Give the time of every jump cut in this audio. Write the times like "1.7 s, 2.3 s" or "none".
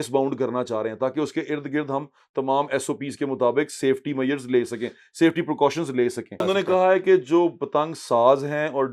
6.4 s